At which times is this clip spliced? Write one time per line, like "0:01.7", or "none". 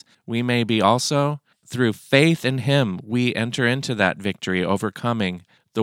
0:01.6